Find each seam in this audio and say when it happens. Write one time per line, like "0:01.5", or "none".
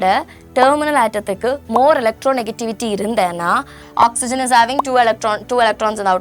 0:03.8